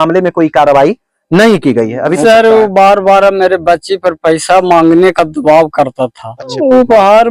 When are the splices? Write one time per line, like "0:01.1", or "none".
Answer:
0:02.2
0:06.5